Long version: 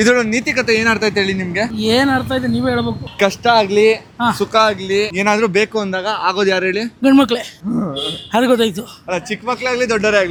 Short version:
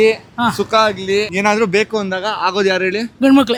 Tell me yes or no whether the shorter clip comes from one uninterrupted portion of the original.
yes